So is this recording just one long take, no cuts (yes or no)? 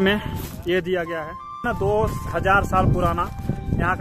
no